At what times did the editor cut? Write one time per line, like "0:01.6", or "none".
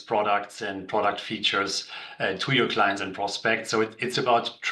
none